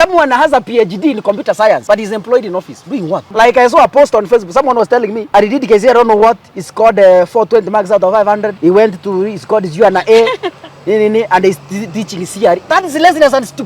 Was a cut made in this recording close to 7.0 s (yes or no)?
no